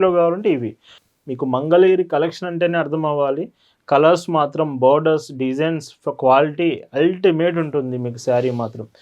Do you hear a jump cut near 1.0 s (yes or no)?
yes